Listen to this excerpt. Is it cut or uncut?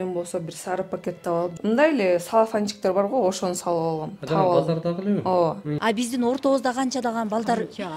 cut